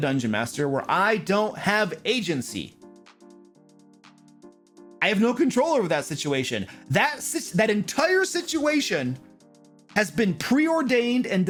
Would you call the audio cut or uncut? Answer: uncut